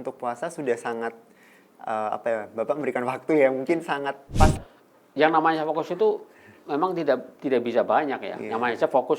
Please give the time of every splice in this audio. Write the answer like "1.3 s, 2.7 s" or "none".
4.5 s

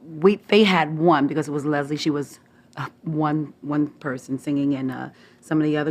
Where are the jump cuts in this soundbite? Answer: 4.6 s

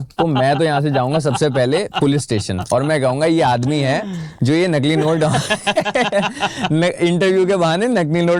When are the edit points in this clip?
none

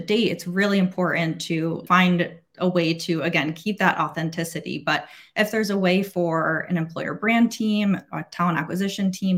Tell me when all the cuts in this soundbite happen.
1.8 s

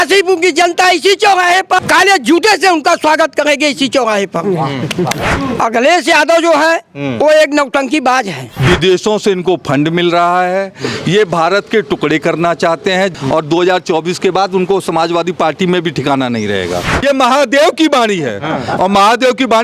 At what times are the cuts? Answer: 1.8 s, 5.3 s, 8.4 s, 13.1 s, 16.9 s

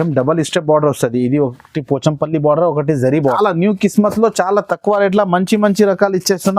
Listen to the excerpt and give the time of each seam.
3.3 s

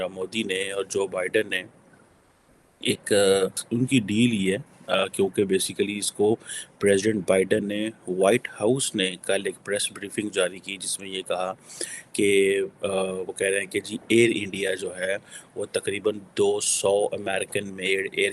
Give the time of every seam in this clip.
3.6 s

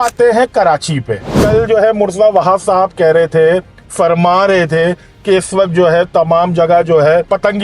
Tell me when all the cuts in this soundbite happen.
1.3 s

